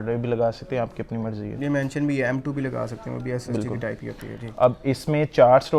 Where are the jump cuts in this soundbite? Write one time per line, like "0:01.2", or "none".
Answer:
none